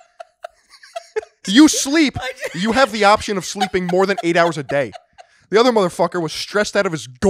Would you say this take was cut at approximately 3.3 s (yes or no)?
no